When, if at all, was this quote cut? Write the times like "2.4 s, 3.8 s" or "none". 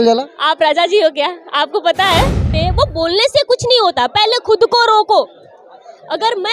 2.5 s